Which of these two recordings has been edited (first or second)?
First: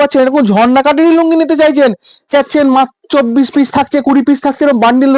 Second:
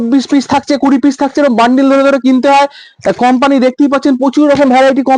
first